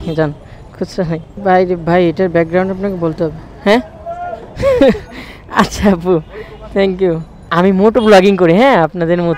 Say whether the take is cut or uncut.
cut